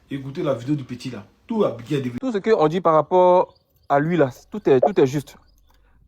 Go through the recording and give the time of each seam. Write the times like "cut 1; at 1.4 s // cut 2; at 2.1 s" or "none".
cut 1; at 2.2 s